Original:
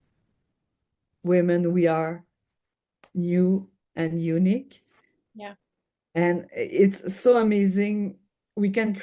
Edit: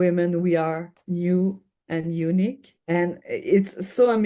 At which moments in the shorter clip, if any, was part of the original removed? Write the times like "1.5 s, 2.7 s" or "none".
0.9 s, 2.7 s